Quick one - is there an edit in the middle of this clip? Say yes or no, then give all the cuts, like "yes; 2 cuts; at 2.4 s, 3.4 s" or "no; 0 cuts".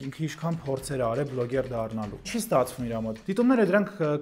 yes; 2 cuts; at 2.3 s, 3.2 s